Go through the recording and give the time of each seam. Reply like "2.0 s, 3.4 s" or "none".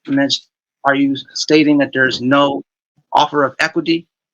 none